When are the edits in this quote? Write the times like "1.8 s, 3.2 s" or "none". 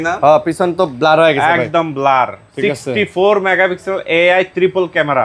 none